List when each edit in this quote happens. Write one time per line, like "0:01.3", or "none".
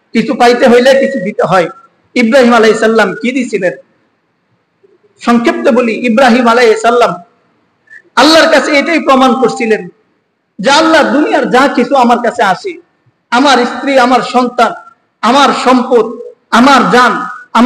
none